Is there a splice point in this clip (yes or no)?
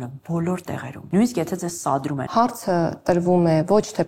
yes